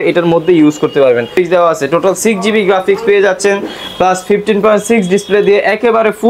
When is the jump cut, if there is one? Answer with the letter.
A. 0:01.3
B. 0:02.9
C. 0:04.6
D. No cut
A